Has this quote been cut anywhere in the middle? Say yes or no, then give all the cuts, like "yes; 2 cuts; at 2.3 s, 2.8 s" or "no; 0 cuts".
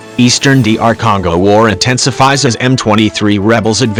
no; 0 cuts